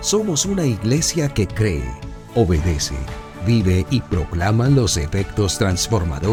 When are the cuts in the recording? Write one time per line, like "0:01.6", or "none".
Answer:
none